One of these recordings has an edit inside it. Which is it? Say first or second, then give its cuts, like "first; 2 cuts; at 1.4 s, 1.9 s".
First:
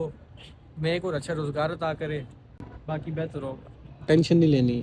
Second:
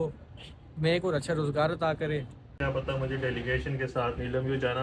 second; 1 cut; at 2.5 s